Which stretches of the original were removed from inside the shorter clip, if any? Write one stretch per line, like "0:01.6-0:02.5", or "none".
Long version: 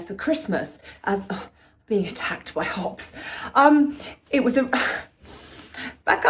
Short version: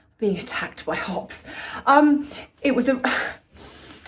none